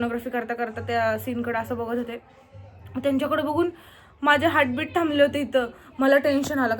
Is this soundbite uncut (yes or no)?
yes